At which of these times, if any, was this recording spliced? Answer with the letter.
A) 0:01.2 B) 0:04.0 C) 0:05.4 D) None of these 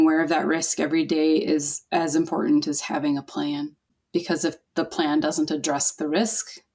B